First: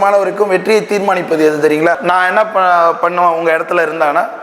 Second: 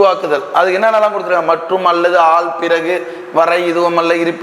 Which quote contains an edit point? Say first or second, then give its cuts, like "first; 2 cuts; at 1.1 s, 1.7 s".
first; 1 cut; at 2.0 s